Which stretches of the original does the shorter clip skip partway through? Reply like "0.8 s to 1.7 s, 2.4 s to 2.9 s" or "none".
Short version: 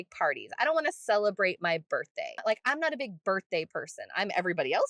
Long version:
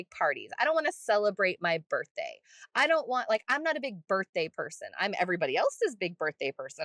2.4 s to 3.2 s